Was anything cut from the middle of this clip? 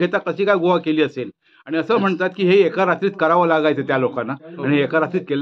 no; 0 cuts

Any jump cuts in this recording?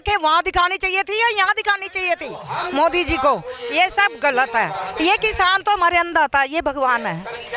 no; 0 cuts

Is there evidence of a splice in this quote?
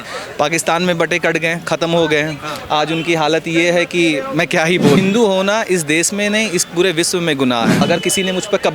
yes; 2 cuts; at 5.0 s, 7.8 s

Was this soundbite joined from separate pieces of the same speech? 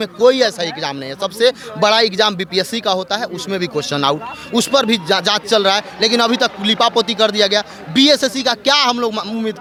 no; 0 cuts

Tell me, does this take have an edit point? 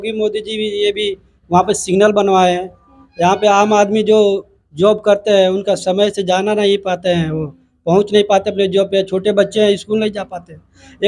no; 0 cuts

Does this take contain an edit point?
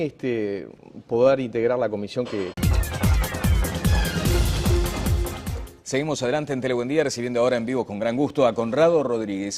no; 0 cuts

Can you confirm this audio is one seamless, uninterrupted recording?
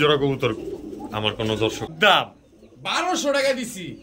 no; 1 cut; at 1.8 s

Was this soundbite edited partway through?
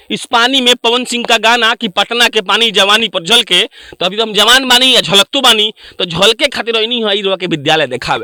no; 0 cuts

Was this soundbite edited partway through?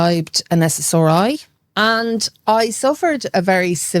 yes; 1 cut; at 1.6 s

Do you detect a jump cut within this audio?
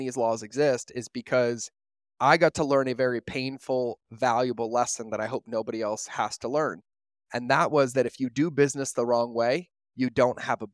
no; 0 cuts

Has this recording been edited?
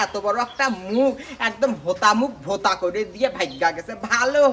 no; 0 cuts

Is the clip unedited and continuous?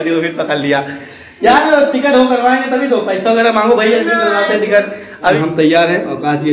no; 1 cut; at 5.1 s

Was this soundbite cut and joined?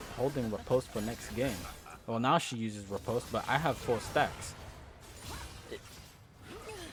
no; 0 cuts

